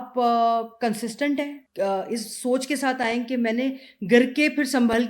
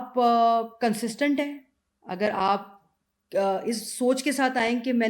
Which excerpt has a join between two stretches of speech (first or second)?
first